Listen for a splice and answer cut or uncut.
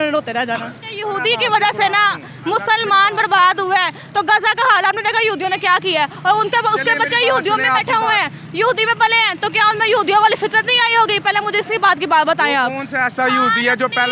cut